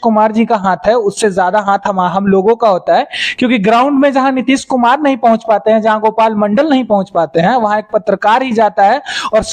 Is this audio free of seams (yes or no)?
yes